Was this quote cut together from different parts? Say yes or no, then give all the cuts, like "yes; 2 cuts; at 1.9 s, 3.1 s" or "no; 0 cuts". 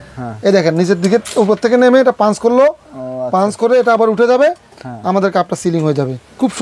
no; 0 cuts